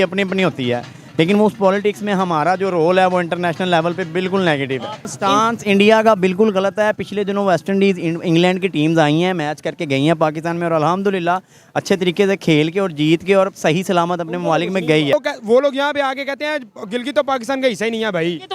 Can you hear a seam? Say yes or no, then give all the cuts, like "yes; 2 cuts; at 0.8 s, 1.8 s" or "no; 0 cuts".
yes; 2 cuts; at 5.1 s, 15.1 s